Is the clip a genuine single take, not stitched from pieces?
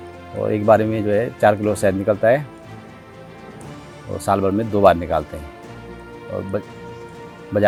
yes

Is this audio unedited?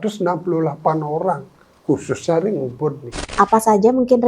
no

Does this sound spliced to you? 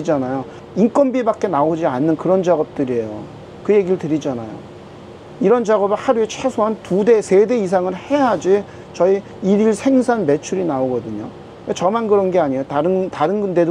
no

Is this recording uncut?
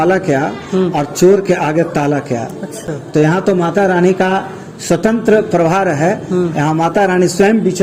yes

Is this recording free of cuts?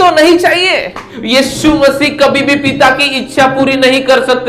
no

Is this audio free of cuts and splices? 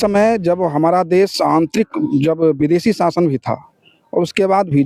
yes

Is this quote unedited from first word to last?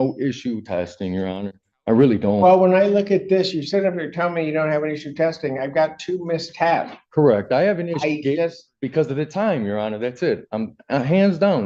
yes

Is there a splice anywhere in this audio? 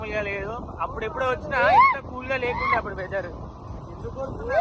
no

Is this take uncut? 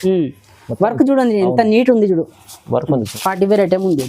no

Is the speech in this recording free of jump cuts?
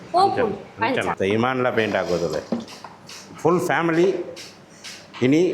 no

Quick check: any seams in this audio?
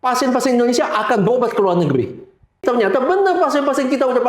yes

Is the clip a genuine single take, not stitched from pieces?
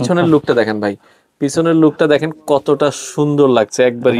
yes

